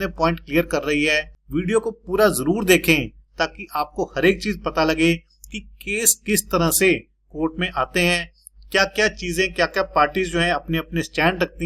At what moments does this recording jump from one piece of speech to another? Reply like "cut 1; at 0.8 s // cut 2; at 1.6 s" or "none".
cut 1; at 1.3 s